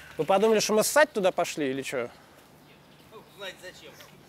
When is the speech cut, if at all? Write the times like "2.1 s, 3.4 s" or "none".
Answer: none